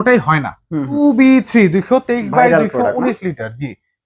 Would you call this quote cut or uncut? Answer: cut